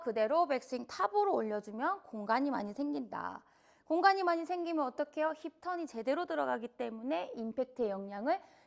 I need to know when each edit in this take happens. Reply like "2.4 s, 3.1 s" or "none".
none